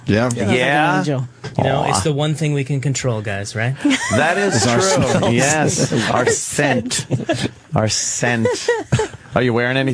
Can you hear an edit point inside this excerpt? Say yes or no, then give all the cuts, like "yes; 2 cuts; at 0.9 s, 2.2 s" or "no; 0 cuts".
yes; 1 cut; at 2.9 s